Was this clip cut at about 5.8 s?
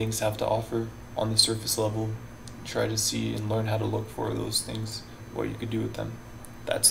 no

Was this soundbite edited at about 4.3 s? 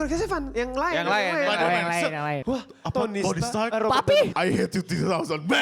yes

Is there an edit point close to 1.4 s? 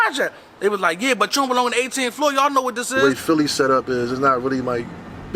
no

